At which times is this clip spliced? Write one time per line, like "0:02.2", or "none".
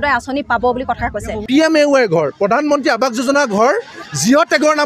0:01.4